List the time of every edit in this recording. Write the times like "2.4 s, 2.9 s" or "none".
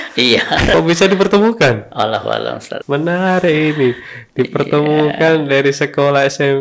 0.7 s, 2.7 s